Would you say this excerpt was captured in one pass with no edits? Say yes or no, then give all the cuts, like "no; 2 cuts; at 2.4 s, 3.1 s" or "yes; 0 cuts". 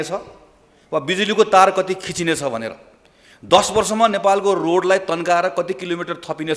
yes; 0 cuts